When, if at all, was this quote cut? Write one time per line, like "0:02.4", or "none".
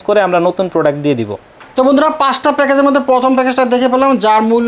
none